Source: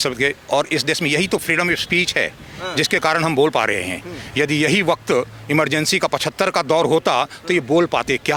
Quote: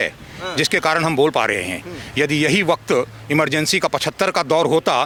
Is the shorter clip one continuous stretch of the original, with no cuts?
yes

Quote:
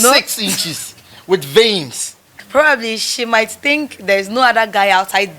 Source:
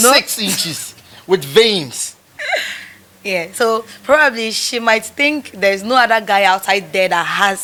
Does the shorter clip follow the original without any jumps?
no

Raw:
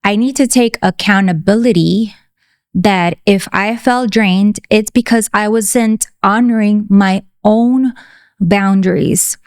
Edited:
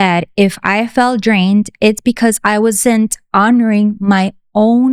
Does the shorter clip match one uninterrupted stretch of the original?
yes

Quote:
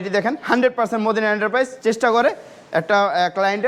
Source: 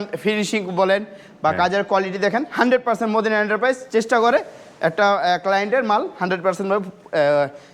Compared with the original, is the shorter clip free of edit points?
yes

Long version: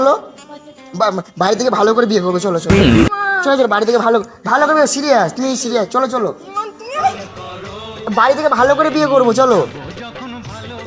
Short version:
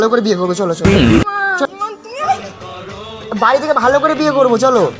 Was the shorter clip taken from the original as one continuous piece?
no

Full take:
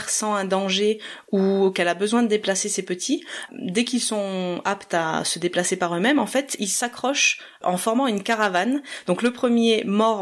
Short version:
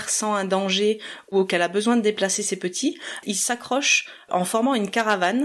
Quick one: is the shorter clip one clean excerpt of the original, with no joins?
no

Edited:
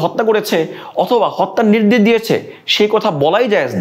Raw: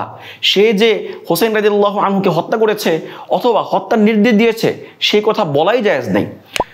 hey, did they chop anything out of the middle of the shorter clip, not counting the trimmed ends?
no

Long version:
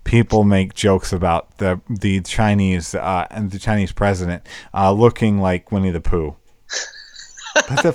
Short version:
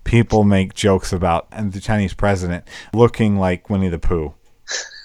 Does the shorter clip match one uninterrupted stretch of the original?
no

